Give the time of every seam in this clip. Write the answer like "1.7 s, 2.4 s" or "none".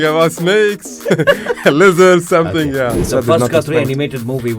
3.1 s